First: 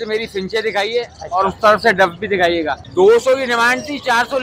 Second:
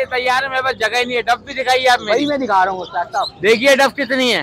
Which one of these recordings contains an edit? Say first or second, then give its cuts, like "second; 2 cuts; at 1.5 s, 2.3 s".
first; 1 cut; at 2.8 s